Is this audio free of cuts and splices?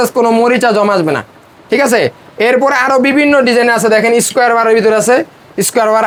yes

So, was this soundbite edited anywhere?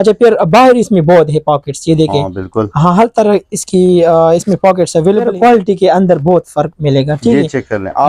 yes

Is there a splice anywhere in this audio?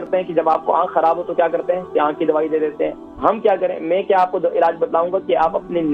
no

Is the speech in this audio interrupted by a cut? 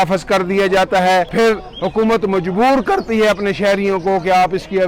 yes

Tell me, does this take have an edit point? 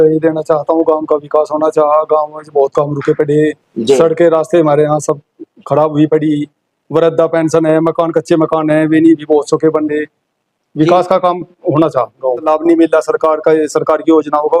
yes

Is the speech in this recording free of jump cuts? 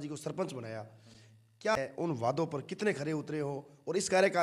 no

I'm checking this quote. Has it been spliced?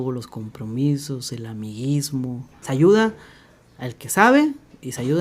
yes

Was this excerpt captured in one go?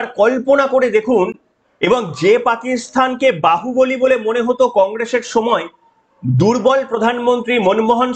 yes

